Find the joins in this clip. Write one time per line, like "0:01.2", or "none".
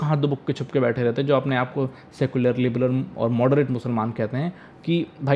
none